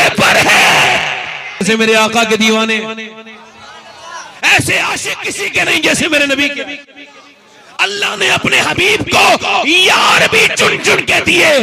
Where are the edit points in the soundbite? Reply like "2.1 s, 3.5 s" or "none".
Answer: 1.6 s